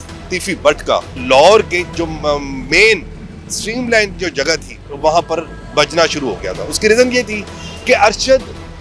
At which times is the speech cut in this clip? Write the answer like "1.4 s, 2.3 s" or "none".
1.2 s